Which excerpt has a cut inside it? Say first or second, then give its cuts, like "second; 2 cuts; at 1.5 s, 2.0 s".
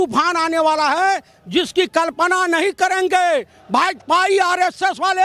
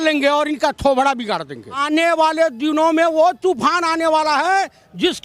second; 1 cut; at 1.8 s